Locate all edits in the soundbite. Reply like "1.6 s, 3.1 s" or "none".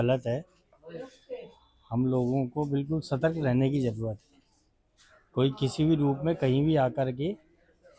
none